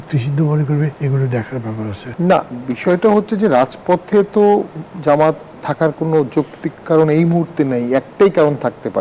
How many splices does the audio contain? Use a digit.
2